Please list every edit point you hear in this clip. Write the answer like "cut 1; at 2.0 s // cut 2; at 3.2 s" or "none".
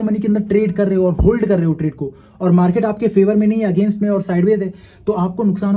none